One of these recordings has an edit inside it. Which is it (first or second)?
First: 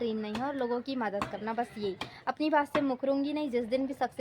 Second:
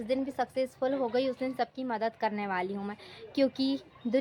first